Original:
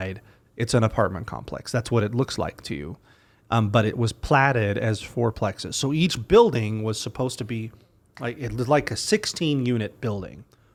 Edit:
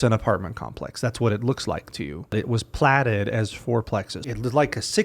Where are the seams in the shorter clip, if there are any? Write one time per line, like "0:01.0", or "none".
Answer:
0:02.3
0:04.2

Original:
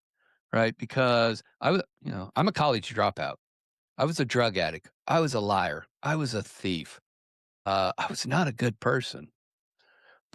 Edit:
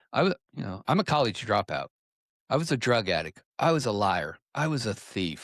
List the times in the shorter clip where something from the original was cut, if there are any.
none

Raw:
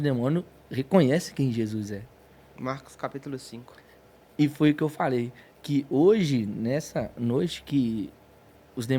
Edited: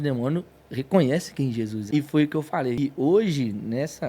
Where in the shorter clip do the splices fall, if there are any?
0:01.8
0:02.8

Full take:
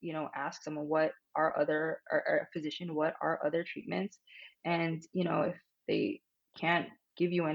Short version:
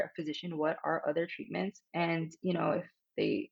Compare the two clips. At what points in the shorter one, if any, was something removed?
0:01.8

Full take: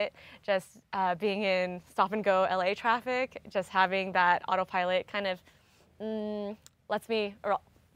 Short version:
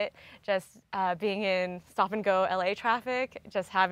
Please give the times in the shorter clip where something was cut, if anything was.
none

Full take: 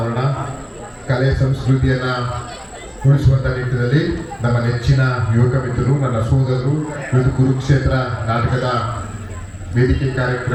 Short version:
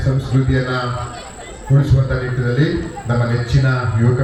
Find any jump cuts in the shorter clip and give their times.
none

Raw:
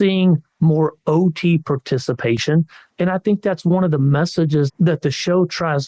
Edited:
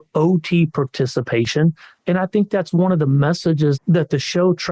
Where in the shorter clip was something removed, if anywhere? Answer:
none

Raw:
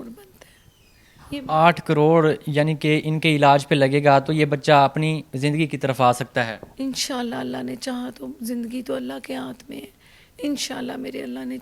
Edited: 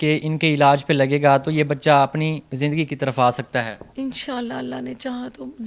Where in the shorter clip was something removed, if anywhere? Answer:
none

